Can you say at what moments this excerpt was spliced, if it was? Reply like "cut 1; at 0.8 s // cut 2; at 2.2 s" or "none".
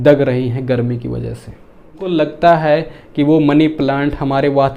cut 1; at 2.1 s